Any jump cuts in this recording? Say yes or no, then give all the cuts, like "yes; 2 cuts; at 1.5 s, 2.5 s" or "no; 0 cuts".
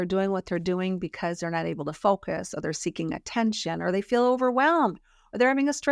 no; 0 cuts